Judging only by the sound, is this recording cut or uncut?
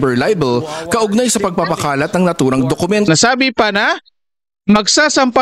cut